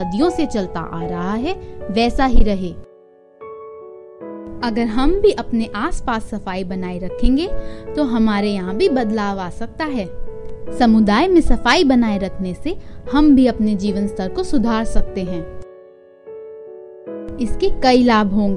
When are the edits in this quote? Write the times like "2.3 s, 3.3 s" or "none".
2.9 s, 4.6 s